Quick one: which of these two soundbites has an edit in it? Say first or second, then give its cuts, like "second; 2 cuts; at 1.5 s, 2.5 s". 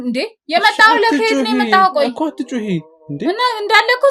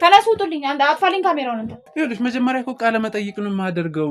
second; 1 cut; at 1.8 s